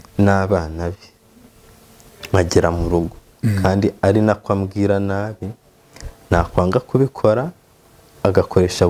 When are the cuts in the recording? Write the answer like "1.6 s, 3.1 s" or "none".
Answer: 3.2 s